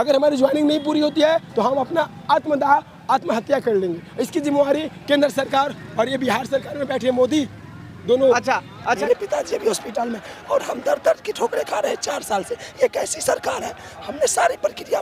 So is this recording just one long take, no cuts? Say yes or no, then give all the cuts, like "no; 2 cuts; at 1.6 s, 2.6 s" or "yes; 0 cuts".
no; 1 cut; at 9.0 s